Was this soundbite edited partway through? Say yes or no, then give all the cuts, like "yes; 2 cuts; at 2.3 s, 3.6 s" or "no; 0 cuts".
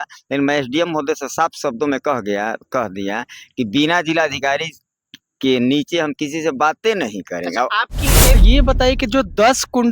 yes; 1 cut; at 8.4 s